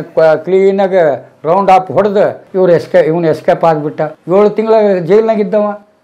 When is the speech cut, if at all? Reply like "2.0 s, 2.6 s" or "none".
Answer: 2.4 s, 4.1 s